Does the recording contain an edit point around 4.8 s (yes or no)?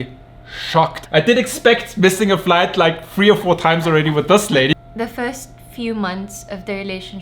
yes